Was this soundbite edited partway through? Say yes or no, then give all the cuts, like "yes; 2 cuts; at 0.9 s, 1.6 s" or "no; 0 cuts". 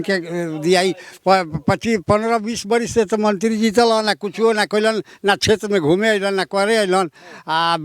no; 0 cuts